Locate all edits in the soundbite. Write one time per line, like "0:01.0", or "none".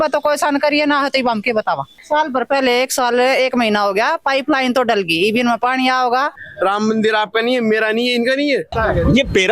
0:02.0
0:06.4
0:08.8